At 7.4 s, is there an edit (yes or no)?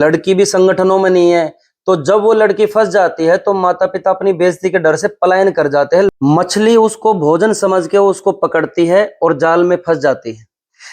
no